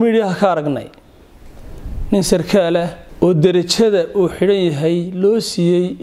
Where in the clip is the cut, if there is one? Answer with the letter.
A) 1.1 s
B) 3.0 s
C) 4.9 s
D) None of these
B